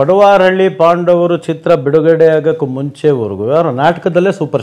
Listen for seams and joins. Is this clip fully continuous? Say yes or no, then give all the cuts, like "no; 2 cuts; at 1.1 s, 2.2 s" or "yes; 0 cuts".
yes; 0 cuts